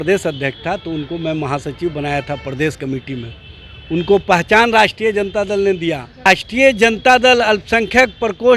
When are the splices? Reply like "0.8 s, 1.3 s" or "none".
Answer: 6.3 s